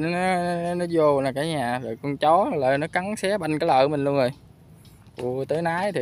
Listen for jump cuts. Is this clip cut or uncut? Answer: uncut